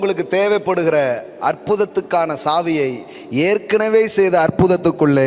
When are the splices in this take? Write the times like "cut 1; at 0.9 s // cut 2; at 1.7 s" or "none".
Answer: none

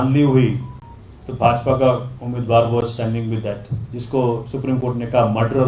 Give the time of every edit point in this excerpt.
none

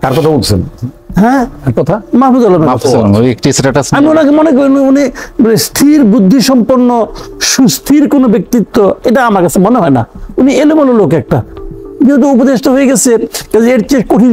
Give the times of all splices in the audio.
none

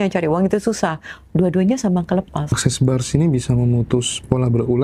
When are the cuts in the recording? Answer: cut 1; at 2.6 s

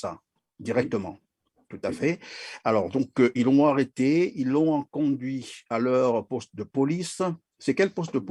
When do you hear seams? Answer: none

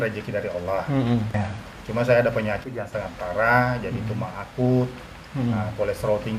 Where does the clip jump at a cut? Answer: cut 1; at 1.3 s

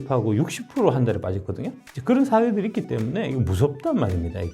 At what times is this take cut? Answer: none

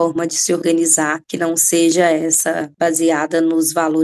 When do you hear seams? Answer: cut 1; at 1.2 s // cut 2; at 2.7 s

